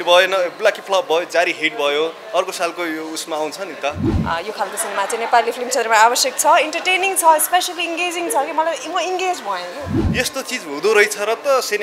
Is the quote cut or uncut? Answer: cut